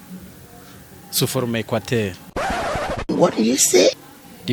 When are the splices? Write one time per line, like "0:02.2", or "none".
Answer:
0:02.2